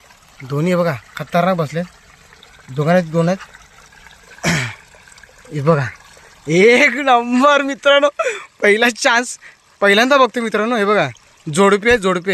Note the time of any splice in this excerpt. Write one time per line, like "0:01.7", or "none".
none